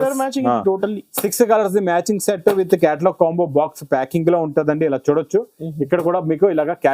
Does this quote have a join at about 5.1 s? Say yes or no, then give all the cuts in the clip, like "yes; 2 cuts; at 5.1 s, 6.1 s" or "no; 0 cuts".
no; 0 cuts